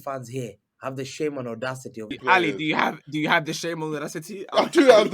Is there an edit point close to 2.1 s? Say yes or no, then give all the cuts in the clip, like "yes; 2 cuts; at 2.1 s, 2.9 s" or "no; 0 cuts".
yes; 1 cut; at 2.1 s